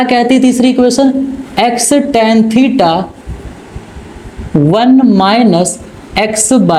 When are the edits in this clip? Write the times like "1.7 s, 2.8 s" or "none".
none